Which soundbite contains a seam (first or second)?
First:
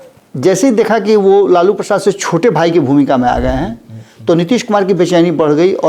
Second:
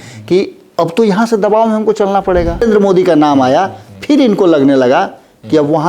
second